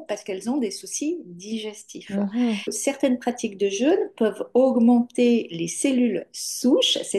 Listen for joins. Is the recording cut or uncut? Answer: cut